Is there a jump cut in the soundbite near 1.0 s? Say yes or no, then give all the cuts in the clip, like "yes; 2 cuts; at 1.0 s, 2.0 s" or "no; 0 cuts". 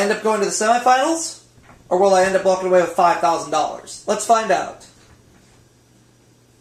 no; 0 cuts